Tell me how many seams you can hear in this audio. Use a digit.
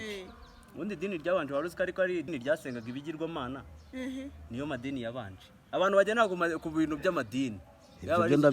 1